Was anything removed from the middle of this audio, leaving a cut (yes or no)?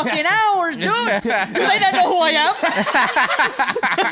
no